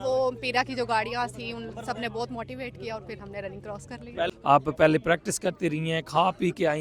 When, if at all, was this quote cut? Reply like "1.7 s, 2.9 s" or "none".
4.3 s